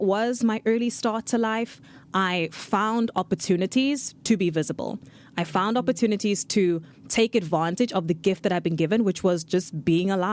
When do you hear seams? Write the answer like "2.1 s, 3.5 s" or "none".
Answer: none